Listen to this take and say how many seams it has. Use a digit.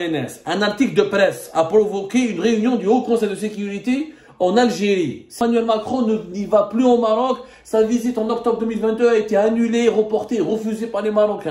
1